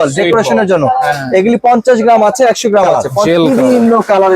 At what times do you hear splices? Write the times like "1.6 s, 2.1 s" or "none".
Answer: 3.1 s